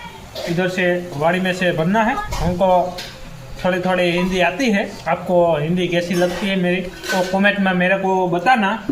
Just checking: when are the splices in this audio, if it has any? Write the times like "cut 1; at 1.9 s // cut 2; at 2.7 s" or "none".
cut 1; at 2.3 s // cut 2; at 4.9 s // cut 3; at 7.0 s